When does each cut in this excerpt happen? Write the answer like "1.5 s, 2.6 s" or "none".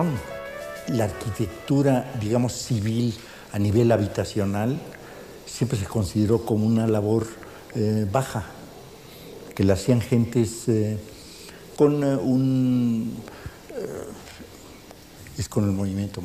3.1 s